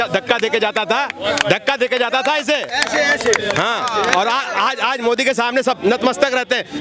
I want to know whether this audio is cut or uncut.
uncut